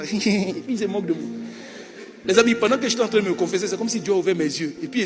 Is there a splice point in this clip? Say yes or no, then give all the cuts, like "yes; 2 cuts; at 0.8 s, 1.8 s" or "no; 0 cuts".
no; 0 cuts